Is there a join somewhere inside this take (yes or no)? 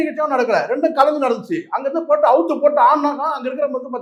no